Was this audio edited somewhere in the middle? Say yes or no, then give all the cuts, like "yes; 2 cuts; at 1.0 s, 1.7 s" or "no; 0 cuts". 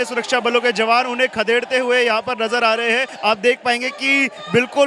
yes; 1 cut; at 3.1 s